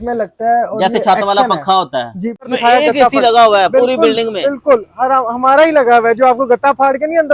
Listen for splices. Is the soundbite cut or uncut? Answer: cut